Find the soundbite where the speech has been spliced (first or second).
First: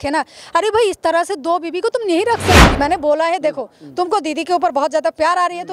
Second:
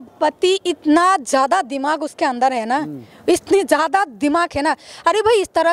first